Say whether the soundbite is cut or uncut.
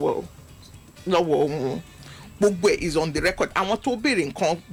uncut